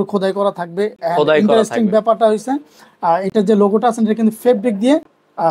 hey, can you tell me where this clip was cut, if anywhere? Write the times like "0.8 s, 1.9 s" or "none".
none

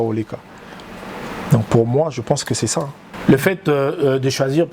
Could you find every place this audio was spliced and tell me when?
3.0 s

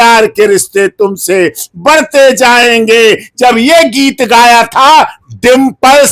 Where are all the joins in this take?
none

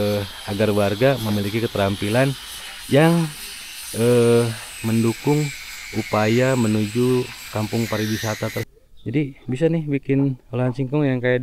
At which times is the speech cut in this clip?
8.7 s

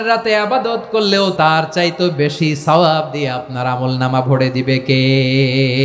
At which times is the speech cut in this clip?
1.3 s

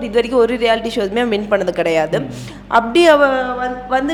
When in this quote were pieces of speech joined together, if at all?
none

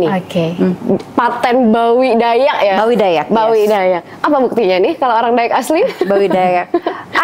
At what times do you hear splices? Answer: none

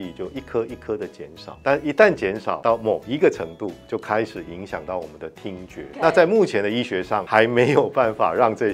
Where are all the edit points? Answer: 1.4 s, 2.6 s, 5.9 s, 7.2 s

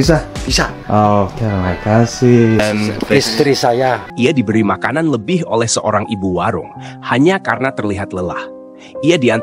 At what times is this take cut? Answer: 4.1 s

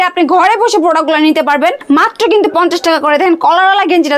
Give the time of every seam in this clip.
1.8 s

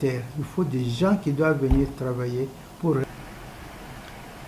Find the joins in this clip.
3.0 s

